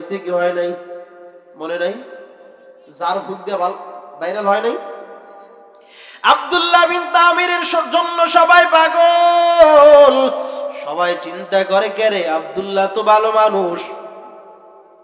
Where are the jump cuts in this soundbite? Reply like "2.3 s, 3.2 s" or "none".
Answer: none